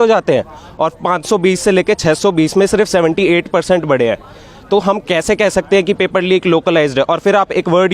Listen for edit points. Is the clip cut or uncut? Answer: uncut